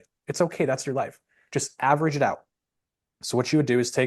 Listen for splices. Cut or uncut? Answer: uncut